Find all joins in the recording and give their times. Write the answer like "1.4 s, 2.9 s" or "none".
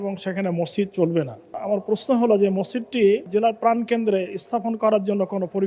1.6 s, 3.3 s

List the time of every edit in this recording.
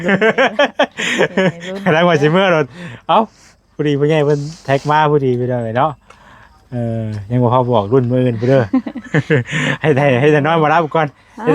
none

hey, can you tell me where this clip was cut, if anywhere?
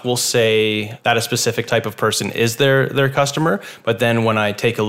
0.9 s

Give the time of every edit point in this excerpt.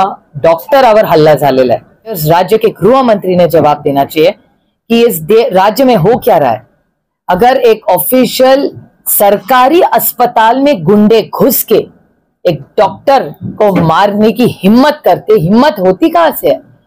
2.2 s

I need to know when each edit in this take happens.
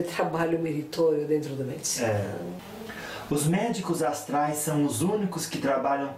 2.7 s

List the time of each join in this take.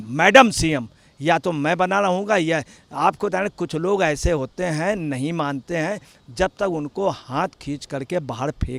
none

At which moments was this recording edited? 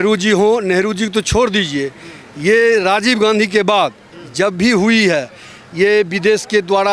none

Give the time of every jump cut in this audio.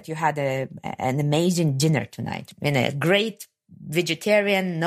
2.4 s

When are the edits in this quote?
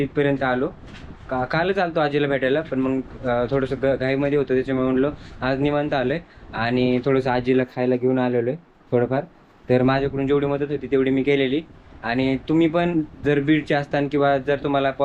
none

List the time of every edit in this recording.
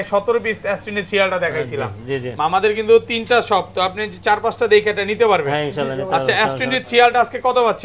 none

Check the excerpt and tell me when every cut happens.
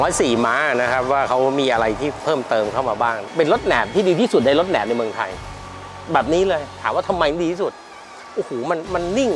3.2 s

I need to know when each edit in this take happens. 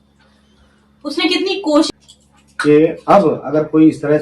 1.9 s

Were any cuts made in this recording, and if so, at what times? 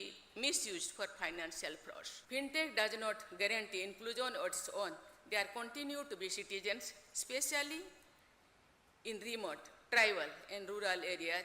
2.1 s

